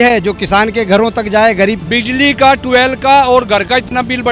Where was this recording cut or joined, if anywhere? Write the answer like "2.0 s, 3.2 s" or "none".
1.8 s